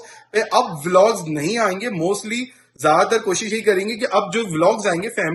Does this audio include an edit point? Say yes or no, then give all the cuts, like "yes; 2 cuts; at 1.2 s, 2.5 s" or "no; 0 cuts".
no; 0 cuts